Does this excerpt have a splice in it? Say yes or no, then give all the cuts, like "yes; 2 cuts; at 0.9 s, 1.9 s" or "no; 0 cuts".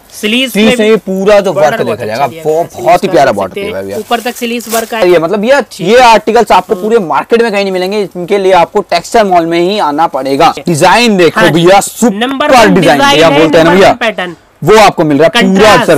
yes; 2 cuts; at 5.0 s, 10.6 s